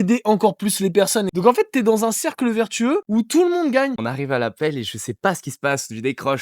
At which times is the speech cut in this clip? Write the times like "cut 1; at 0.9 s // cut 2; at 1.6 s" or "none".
cut 1; at 1.3 s // cut 2; at 3.0 s // cut 3; at 4.0 s